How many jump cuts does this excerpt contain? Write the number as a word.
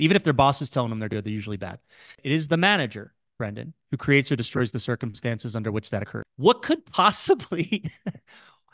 two